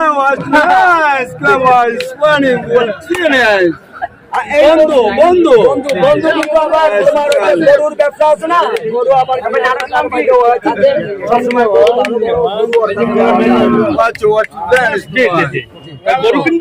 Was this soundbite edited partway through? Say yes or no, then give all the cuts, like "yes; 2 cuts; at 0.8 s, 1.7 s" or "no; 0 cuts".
no; 0 cuts